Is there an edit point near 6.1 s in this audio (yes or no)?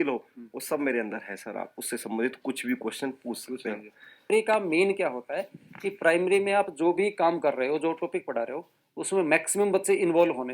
no